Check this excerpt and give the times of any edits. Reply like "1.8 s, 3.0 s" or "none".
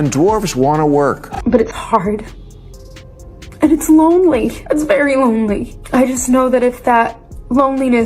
1.3 s